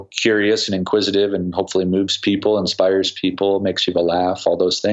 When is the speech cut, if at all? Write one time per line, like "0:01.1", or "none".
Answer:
none